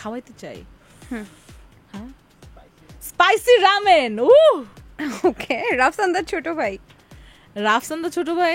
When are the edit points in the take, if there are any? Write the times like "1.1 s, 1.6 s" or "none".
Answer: none